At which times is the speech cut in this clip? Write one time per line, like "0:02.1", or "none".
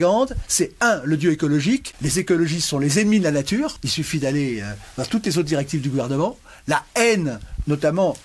0:02.0
0:03.8